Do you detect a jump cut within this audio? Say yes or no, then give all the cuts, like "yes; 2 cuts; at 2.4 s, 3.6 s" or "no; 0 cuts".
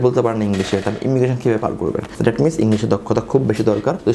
yes; 1 cut; at 2.1 s